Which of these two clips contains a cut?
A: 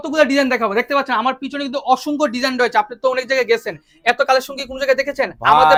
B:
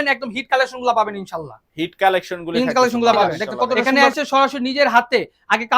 B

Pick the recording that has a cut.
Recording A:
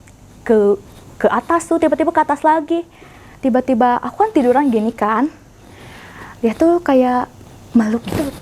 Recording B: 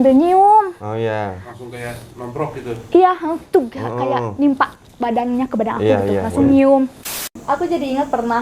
B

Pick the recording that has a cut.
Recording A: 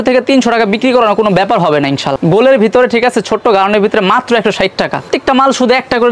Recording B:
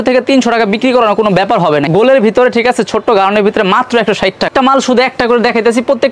B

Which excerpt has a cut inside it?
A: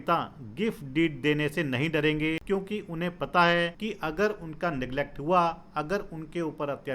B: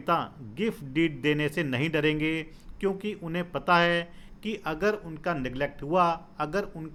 A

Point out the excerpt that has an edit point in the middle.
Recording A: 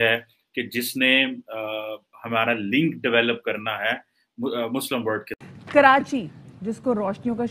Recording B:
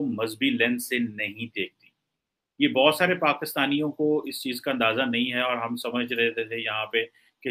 A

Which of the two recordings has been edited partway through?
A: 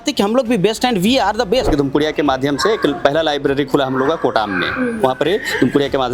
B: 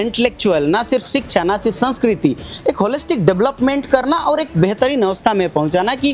A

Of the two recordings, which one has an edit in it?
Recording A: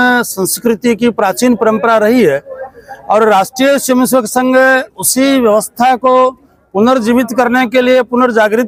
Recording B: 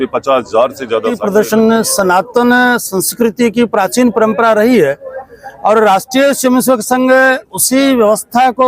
B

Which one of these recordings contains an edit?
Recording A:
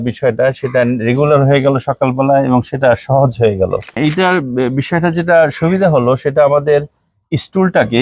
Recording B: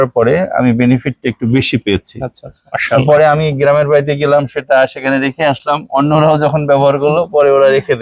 A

